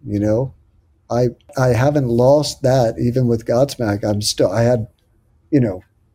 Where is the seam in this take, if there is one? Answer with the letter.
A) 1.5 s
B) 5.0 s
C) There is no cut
A